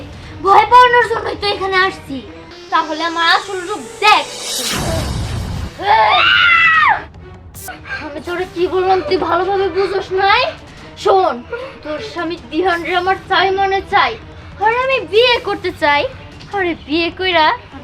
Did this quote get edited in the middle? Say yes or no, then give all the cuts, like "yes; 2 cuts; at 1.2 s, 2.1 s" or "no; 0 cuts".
yes; 2 cuts; at 2.6 s, 7.6 s